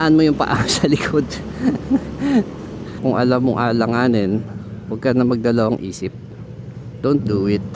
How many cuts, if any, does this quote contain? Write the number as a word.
one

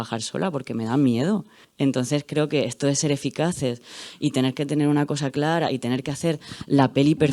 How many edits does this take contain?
one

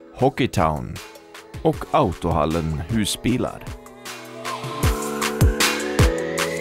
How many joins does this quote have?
one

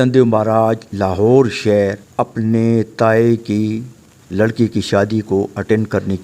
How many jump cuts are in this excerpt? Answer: one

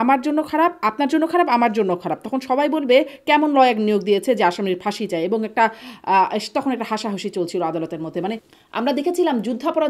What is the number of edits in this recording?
one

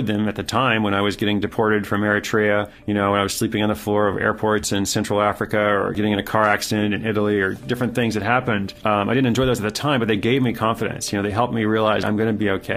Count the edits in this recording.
four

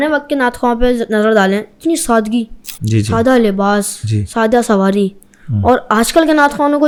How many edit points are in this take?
zero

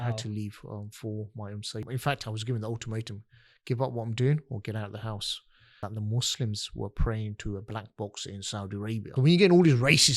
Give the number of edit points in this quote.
three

